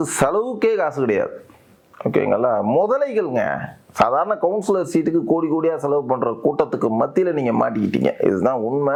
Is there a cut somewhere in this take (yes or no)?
no